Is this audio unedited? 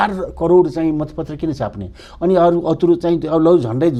yes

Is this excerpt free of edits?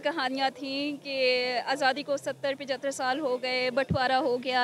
yes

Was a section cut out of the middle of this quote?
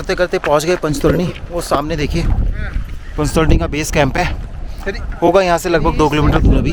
no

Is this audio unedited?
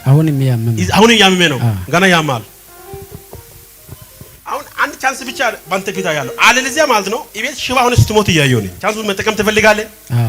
no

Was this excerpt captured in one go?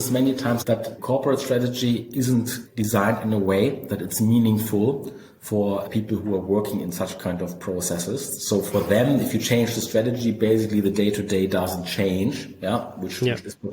no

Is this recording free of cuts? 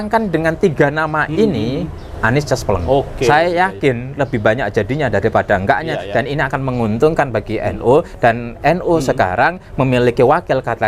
yes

